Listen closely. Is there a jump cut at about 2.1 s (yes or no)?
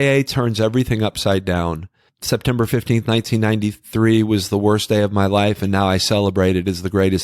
yes